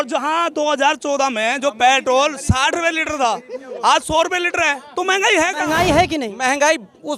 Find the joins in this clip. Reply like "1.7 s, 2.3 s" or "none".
5.7 s